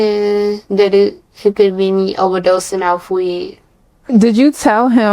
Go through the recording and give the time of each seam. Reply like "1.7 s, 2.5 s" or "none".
4.1 s